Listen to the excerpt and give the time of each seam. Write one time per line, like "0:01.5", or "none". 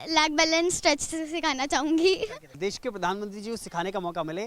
0:02.5